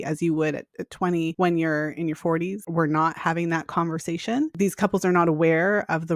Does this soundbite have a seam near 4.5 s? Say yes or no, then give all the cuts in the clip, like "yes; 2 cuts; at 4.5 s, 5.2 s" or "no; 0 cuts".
yes; 3 cuts; at 1.3 s, 2.6 s, 4.5 s